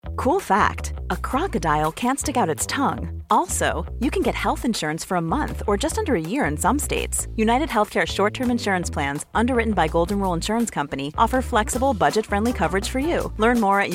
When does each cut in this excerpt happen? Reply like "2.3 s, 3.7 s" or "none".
none